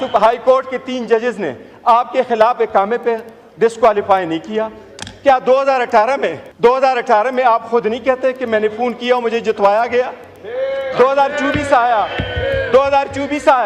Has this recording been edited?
yes; 1 cut; at 6.4 s

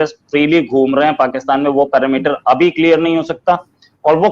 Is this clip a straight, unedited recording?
yes; 0 cuts

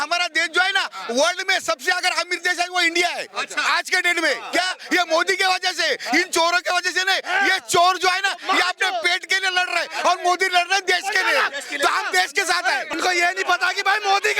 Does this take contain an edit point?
yes; 1 cut; at 12.9 s

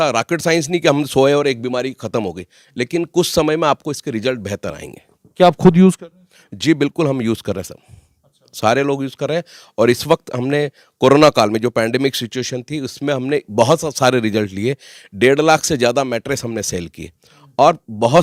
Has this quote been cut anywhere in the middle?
no; 0 cuts

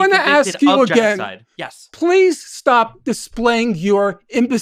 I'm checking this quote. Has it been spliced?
no; 0 cuts

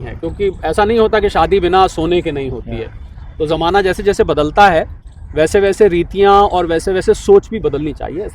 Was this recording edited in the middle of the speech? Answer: no; 0 cuts

